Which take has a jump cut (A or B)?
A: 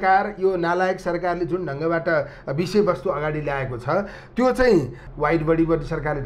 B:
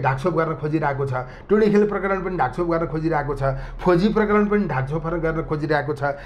A